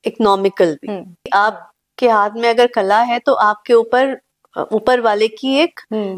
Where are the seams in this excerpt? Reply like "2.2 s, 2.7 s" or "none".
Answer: 1.3 s